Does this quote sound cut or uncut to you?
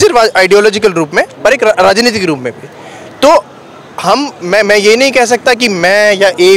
uncut